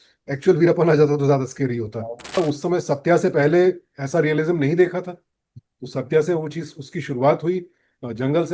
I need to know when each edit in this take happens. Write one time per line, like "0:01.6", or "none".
0:02.4